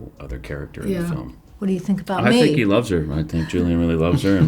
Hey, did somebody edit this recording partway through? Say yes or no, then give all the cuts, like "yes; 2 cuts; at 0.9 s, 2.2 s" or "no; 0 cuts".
yes; 1 cut; at 1.4 s